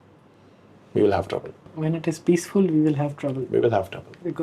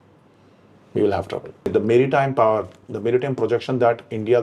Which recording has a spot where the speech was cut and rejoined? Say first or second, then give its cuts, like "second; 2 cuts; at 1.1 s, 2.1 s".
second; 1 cut; at 1.7 s